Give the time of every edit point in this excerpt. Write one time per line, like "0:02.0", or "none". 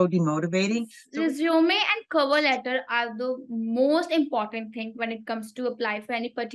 0:01.0